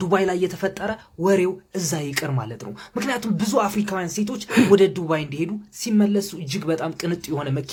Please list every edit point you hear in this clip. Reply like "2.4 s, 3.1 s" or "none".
none